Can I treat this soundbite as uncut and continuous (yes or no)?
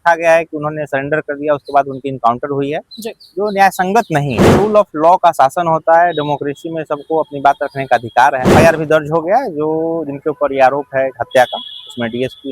no